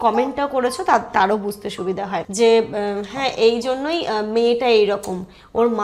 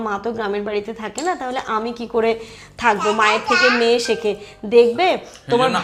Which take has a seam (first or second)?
first